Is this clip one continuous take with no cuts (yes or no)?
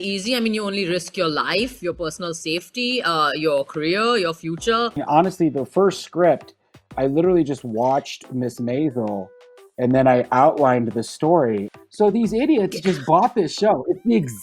no